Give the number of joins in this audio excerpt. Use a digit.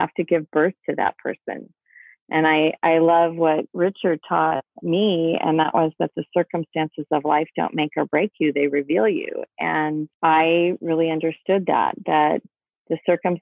1